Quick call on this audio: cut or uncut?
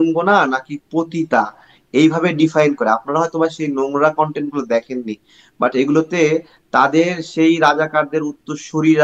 uncut